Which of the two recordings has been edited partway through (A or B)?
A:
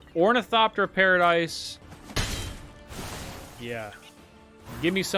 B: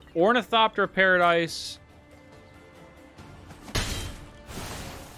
A